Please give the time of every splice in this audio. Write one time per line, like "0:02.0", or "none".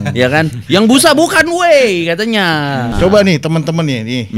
0:02.9